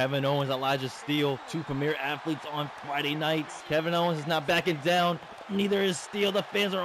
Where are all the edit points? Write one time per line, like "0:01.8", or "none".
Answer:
0:01.4
0:03.6